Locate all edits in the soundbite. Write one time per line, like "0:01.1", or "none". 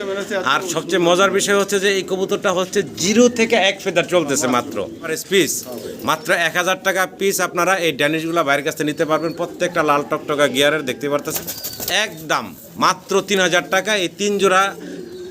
0:05.2
0:11.3